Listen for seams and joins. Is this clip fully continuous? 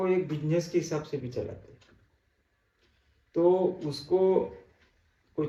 yes; 0 cuts

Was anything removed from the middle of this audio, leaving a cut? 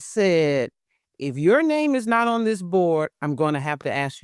no; 0 cuts

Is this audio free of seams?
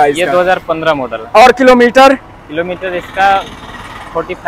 yes; 0 cuts

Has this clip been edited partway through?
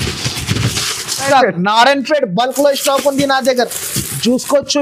yes; 1 cut; at 1.3 s

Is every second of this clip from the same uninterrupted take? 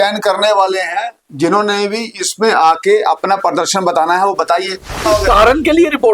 no; 1 cut; at 5.0 s

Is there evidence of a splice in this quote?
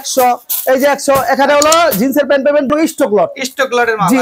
yes; 1 cut; at 2.7 s

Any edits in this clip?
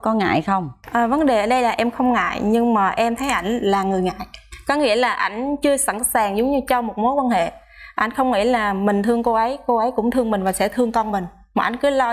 no; 0 cuts

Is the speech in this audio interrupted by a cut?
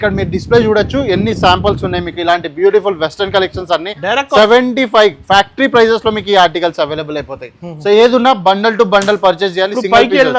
no; 0 cuts

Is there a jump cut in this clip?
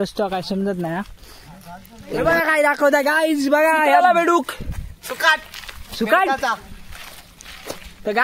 yes; 1 cut; at 2.2 s

